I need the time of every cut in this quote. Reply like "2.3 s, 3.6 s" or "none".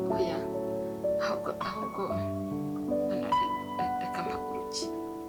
none